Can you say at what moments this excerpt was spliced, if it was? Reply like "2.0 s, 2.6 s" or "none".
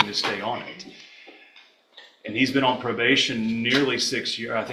none